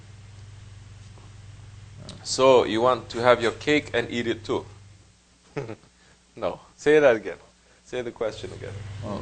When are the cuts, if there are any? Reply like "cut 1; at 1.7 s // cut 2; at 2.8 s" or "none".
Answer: none